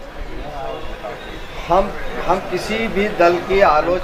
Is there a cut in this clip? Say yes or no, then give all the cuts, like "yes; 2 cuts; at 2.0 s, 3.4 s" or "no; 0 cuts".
no; 0 cuts